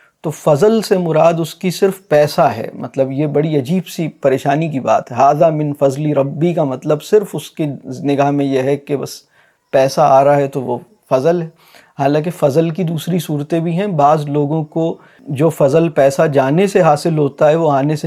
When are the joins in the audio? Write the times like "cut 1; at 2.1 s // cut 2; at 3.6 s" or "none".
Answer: none